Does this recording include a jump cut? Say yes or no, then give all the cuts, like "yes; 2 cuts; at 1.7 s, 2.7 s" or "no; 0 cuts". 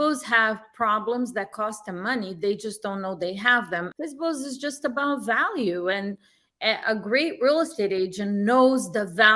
yes; 1 cut; at 3.9 s